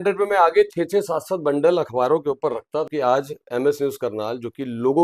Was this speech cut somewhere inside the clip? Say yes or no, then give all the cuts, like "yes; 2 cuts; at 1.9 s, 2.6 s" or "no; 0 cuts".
yes; 1 cut; at 2.9 s